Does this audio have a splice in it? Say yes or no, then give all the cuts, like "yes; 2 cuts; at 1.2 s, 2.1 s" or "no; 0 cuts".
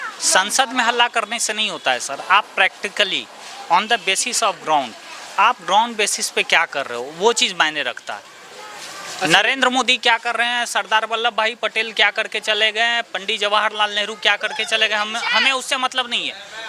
no; 0 cuts